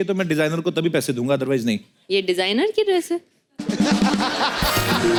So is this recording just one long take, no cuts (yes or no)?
yes